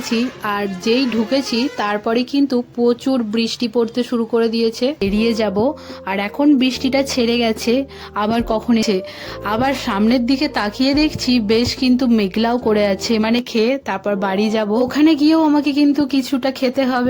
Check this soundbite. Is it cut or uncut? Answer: cut